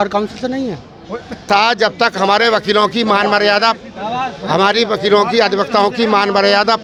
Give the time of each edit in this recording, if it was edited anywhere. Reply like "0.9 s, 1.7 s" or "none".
none